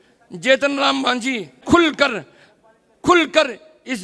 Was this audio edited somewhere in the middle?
yes; 1 cut; at 1.6 s

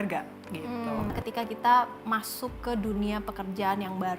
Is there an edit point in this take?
yes; 1 cut; at 1.1 s

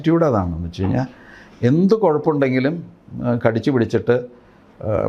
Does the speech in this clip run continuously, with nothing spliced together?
yes; 0 cuts

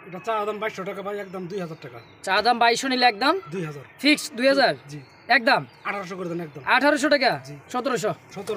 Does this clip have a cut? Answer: no; 0 cuts

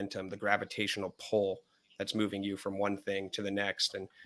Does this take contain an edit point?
no; 0 cuts

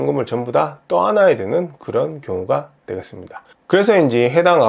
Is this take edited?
no; 0 cuts

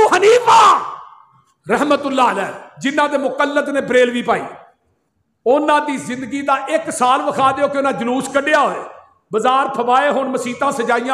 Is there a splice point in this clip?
no; 0 cuts

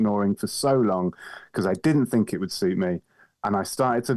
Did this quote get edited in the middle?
no; 0 cuts

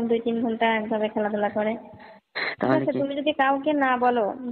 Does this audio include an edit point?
no; 0 cuts

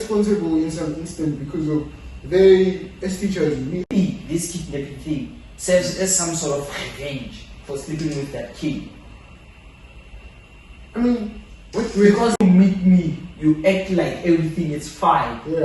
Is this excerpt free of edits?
no; 2 cuts; at 3.9 s, 12.4 s

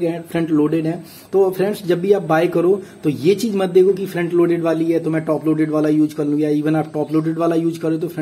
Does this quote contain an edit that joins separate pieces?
no; 0 cuts

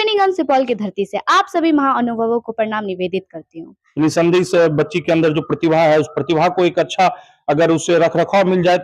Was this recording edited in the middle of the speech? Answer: yes; 1 cut; at 3.8 s

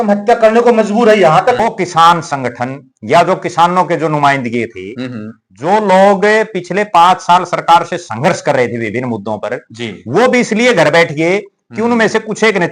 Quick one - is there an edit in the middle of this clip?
yes; 1 cut; at 1.6 s

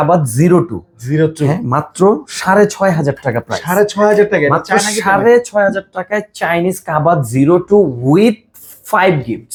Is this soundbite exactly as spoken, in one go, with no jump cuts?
yes; 0 cuts

